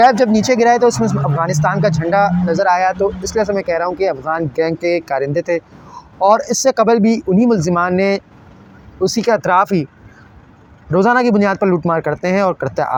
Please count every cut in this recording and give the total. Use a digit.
0